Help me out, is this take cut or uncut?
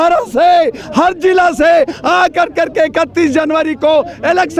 uncut